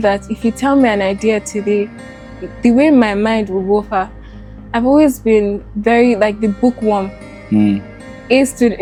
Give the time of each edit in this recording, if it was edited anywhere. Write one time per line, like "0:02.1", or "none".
none